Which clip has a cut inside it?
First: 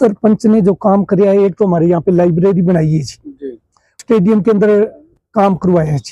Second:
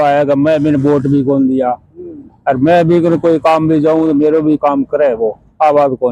first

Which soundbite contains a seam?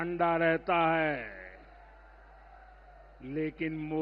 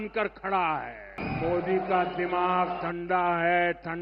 second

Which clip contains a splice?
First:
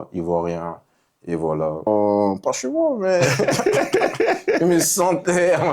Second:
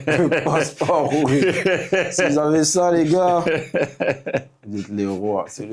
first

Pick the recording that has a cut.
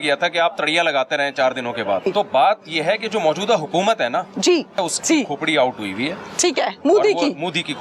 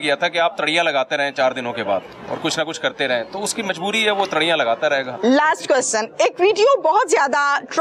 first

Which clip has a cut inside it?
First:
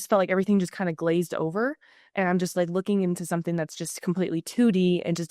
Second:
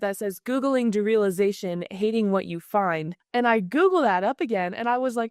second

